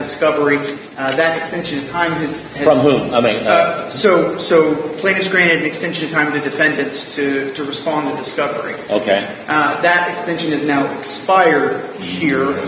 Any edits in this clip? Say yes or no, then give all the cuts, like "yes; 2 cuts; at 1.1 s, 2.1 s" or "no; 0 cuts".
no; 0 cuts